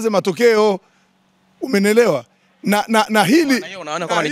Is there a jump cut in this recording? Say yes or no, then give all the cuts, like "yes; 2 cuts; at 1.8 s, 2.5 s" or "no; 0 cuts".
no; 0 cuts